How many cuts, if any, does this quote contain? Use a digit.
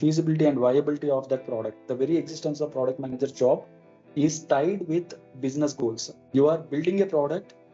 2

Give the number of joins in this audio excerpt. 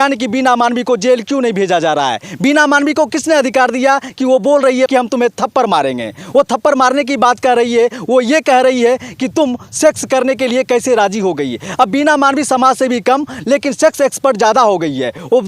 0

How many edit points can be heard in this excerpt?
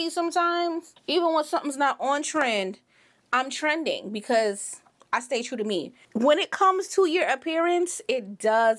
2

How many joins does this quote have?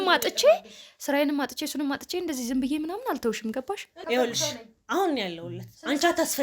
1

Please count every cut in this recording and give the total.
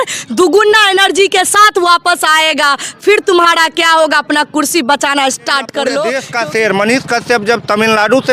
1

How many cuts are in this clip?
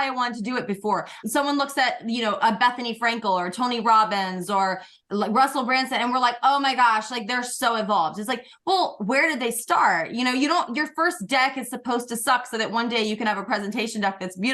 1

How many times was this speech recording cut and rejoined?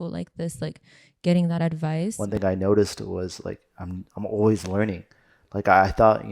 1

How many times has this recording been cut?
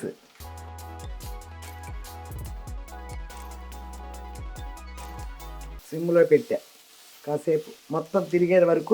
1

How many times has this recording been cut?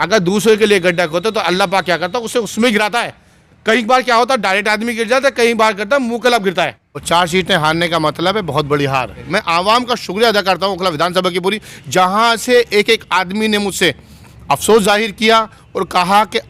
2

